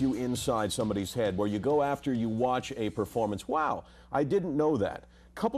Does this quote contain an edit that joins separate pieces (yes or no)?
yes